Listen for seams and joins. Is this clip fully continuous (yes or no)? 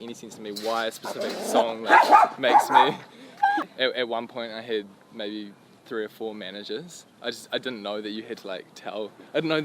no